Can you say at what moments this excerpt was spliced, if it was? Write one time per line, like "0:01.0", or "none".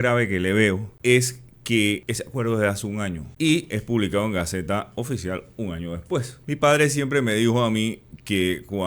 0:00.9
0:02.1
0:03.3
0:06.3